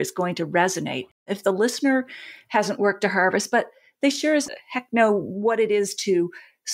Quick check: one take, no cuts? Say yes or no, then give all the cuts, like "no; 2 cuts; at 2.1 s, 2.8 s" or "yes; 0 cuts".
no; 1 cut; at 1.3 s